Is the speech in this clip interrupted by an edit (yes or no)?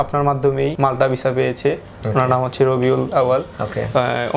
no